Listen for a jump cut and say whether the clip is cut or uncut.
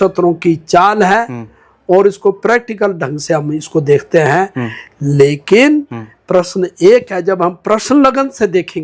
uncut